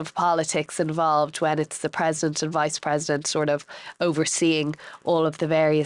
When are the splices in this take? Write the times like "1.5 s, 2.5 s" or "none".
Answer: none